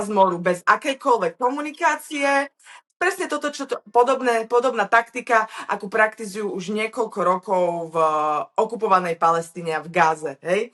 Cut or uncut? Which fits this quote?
uncut